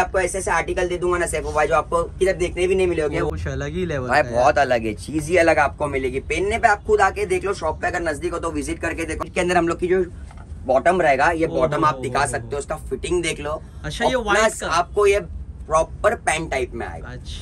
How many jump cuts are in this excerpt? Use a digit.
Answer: 2